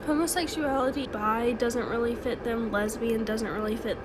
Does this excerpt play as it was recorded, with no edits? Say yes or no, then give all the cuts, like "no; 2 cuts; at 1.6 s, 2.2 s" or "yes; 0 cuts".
no; 1 cut; at 1.1 s